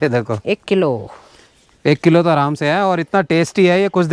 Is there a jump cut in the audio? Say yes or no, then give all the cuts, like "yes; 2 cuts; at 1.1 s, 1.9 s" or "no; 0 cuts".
no; 0 cuts